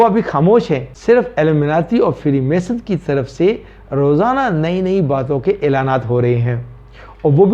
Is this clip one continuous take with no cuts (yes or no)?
no